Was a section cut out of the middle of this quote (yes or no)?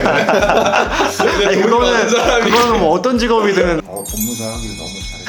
yes